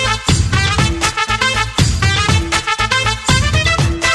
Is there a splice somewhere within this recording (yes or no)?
no